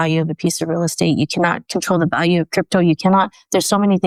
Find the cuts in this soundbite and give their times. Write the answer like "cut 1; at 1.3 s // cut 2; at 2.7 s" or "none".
none